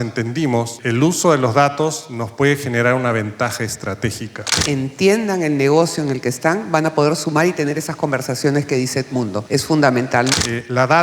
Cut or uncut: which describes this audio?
cut